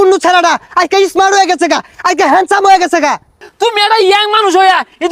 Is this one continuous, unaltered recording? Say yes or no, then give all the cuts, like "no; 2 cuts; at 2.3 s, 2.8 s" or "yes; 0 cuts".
no; 1 cut; at 3.5 s